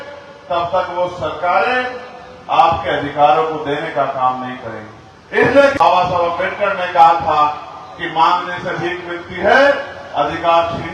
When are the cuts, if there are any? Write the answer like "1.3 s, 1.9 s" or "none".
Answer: 5.8 s